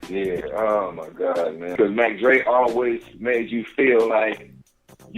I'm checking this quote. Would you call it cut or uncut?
cut